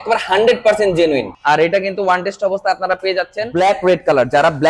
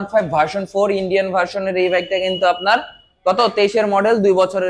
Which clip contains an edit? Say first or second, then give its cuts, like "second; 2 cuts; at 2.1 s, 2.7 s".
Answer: first; 2 cuts; at 1.3 s, 3.4 s